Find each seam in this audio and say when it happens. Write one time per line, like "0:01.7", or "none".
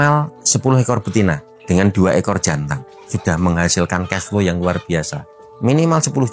0:03.0
0:05.4